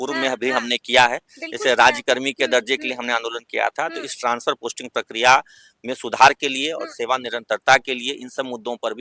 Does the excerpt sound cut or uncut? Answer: uncut